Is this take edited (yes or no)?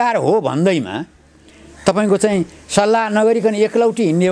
no